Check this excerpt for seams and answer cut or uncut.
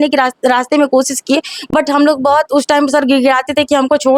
uncut